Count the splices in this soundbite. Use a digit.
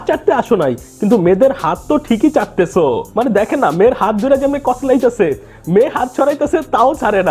0